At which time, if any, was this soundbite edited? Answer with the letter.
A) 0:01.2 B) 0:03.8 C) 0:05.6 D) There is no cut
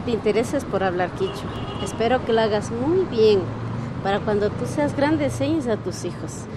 D